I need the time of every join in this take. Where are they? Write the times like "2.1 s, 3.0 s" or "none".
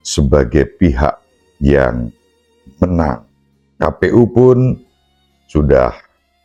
none

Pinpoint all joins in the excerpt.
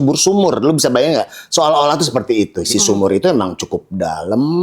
2.7 s

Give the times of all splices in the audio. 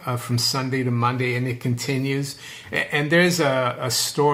none

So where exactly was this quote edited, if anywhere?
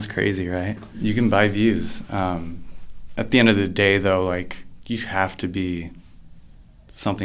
1.0 s

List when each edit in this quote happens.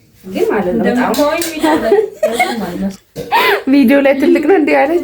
1.5 s

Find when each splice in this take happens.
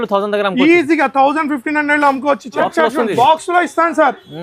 2.6 s

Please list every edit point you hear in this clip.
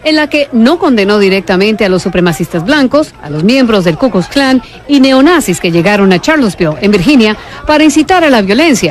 5.8 s

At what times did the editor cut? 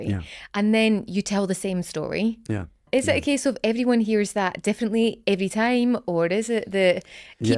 2.8 s

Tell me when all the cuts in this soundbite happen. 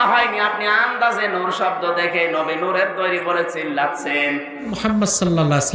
4.7 s

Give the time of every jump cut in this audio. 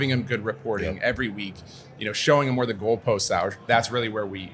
3.6 s

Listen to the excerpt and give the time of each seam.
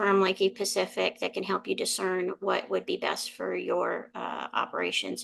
none

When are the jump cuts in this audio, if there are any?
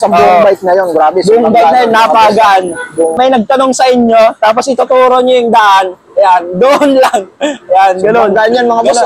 3.1 s

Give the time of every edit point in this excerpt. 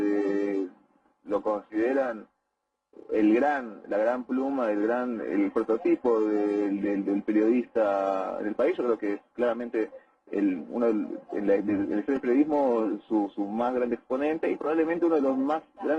6.8 s

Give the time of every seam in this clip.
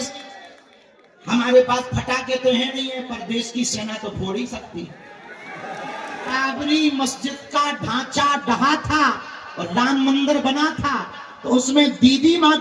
6.4 s

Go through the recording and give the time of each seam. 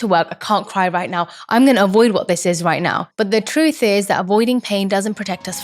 3.1 s

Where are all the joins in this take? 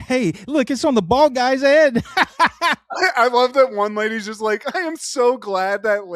none

